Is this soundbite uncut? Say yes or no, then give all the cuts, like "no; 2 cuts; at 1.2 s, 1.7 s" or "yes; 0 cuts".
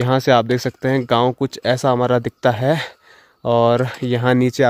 yes; 0 cuts